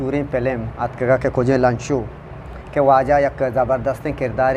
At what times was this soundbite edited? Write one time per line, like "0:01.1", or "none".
none

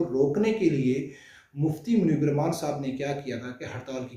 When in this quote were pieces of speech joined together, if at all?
none

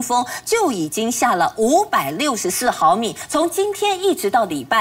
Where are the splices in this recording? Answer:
0:03.2

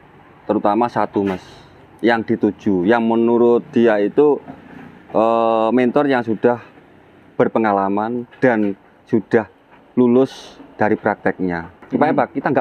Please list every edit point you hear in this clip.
0:11.7

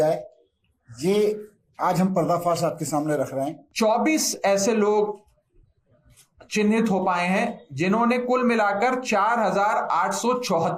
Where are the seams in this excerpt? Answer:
0:03.6

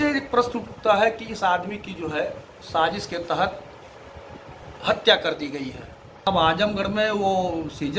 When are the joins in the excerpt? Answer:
0:06.3

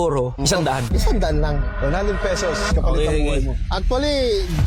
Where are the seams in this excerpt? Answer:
none

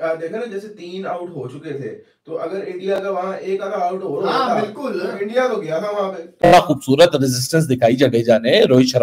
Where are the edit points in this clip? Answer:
0:06.5

